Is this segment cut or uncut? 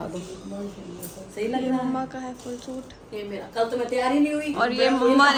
uncut